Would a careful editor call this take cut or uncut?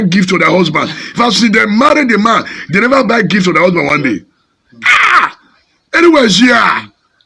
uncut